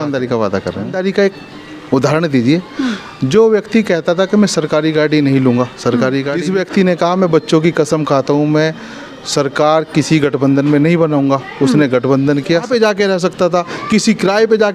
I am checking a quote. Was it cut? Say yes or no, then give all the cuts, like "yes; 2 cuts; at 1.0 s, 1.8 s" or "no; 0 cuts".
yes; 3 cuts; at 0.9 s, 6.4 s, 12.7 s